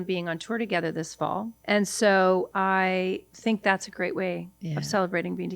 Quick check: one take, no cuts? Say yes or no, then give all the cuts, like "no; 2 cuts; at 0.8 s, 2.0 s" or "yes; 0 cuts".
no; 2 cuts; at 1.5 s, 2.7 s